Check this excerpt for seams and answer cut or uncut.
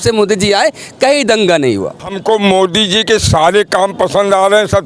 cut